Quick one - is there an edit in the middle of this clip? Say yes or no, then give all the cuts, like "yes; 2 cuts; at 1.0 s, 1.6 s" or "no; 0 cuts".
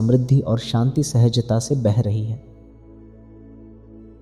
no; 0 cuts